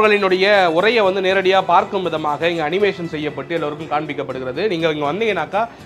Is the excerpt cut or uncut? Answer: uncut